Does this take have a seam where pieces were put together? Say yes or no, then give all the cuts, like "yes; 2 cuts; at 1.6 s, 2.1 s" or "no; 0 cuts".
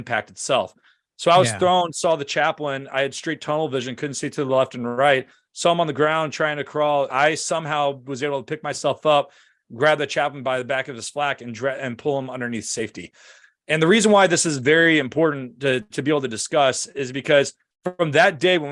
yes; 1 cut; at 7.1 s